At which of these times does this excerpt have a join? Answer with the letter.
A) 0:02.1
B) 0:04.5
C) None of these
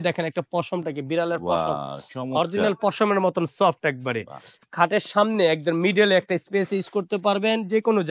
B